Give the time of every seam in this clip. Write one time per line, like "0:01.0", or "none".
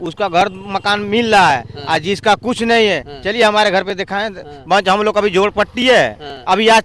none